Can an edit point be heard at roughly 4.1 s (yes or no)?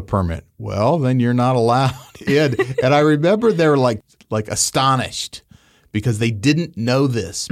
yes